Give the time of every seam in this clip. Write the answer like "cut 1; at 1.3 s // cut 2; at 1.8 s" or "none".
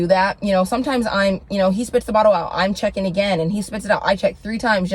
none